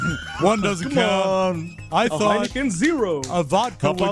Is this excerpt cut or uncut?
uncut